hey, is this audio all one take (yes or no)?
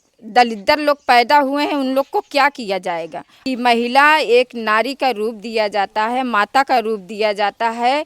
no